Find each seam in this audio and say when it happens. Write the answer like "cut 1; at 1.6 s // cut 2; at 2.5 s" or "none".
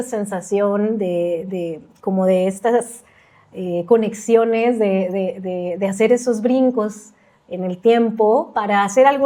none